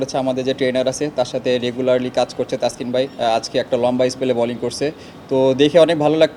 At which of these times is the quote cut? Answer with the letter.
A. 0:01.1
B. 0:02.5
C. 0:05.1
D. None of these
D